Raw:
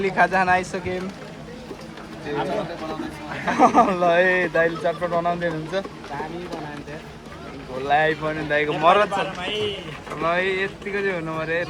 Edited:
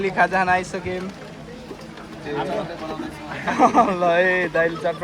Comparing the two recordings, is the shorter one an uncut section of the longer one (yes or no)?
yes